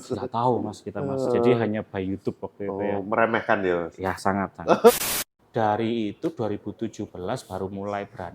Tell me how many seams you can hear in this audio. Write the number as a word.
one